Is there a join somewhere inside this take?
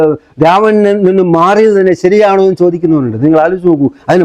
no; 0 cuts

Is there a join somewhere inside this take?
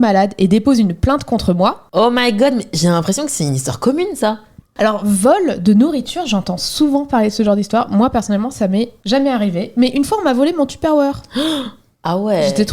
no; 0 cuts

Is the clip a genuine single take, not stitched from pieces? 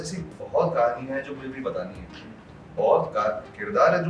yes; 0 cuts

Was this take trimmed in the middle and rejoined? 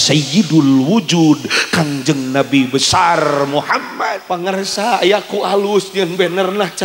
yes; 1 cut; at 4.7 s

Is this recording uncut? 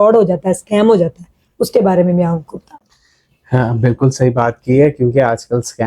yes; 0 cuts

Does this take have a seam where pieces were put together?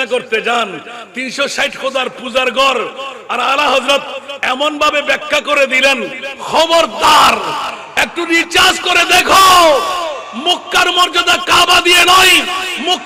no; 0 cuts

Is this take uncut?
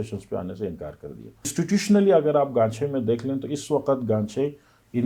no; 1 cut; at 1.5 s

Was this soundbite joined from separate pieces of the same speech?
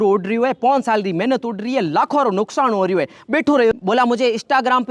yes; 1 cut; at 3.7 s

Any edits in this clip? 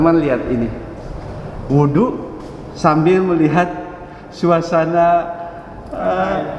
no; 0 cuts

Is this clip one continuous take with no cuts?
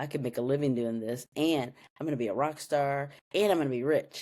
yes; 0 cuts

